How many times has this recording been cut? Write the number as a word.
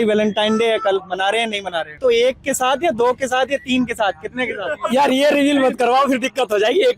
one